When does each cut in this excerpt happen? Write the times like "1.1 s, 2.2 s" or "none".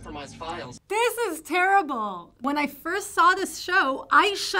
2.4 s